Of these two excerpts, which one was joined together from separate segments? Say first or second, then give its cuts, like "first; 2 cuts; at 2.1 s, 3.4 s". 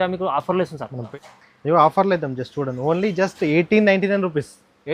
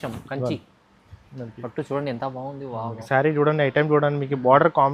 first; 1 cut; at 1.0 s